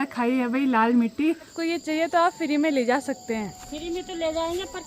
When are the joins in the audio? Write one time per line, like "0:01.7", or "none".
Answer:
0:01.8